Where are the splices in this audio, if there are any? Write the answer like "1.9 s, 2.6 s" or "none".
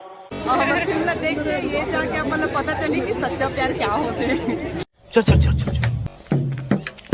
6.0 s